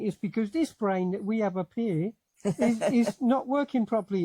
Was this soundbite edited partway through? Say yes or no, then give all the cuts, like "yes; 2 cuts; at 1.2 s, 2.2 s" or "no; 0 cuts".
no; 0 cuts